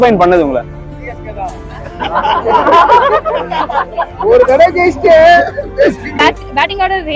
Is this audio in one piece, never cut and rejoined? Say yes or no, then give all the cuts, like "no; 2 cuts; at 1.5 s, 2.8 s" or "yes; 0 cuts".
no; 1 cut; at 6.2 s